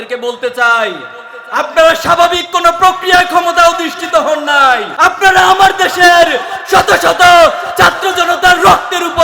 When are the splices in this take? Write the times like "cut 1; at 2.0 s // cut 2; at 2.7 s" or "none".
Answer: cut 1; at 4.9 s